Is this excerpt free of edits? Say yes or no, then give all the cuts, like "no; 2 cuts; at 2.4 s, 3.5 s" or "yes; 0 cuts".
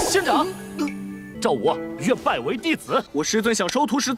yes; 0 cuts